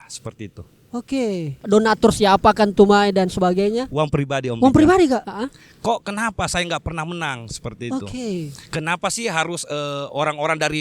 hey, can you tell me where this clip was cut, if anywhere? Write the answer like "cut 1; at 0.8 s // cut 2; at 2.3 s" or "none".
cut 1; at 1.5 s // cut 2; at 5.3 s